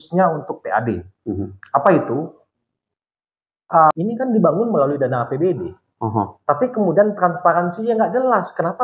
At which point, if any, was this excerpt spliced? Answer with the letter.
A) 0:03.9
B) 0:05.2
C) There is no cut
A